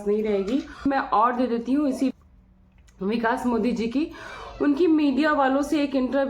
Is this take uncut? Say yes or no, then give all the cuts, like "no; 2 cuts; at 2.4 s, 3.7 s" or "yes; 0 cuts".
no; 2 cuts; at 0.8 s, 2.1 s